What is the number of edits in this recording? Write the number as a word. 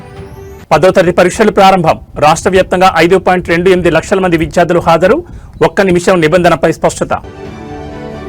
zero